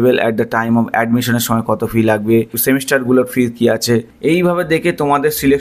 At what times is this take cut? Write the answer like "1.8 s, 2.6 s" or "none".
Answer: none

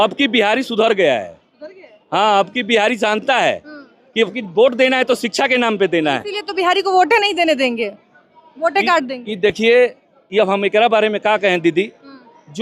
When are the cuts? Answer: none

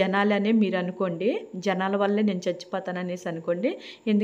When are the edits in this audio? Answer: none

